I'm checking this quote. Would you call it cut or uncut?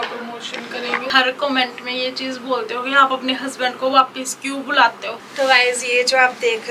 cut